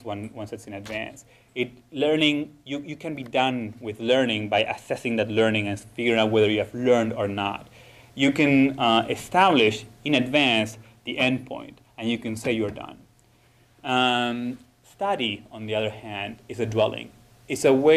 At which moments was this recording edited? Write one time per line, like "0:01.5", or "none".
0:07.4